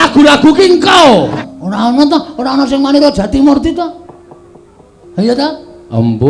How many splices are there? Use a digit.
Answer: 1